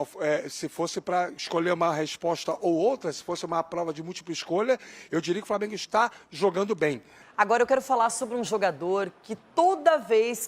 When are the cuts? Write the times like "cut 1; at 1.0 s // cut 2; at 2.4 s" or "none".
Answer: cut 1; at 7.2 s